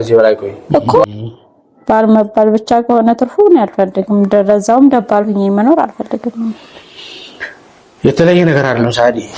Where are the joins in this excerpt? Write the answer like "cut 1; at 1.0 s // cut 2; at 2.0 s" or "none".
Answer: cut 1; at 1.1 s